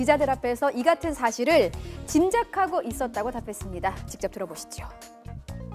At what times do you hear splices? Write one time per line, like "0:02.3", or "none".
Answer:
0:04.6